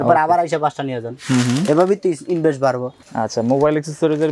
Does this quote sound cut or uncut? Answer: cut